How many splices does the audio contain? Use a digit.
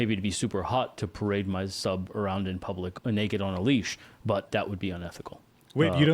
2